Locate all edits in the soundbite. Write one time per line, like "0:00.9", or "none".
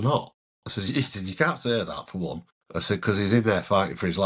0:02.5

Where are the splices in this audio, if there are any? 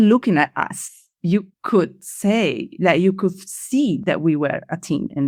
none

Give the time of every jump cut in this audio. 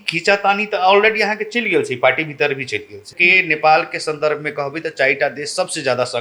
0:03.1

